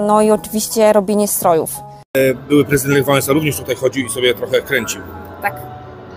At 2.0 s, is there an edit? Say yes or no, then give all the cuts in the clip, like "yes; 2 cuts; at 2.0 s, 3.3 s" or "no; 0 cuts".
yes; 1 cut; at 2.0 s